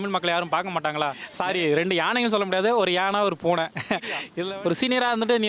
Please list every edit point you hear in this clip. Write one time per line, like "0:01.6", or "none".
0:01.3
0:04.3